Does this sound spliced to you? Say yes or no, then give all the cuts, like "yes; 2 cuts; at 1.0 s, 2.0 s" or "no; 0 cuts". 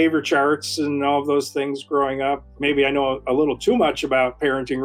yes; 1 cut; at 2.5 s